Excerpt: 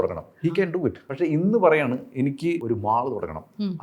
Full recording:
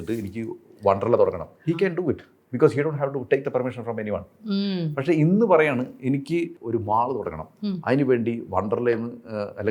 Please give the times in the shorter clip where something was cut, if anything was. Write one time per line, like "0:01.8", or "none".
0:01.1
0:02.6